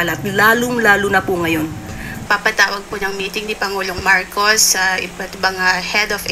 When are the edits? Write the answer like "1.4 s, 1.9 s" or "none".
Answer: 2.2 s